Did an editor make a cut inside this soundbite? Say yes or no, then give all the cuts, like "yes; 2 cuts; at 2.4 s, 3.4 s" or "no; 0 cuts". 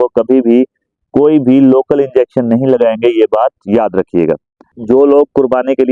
yes; 1 cut; at 4.7 s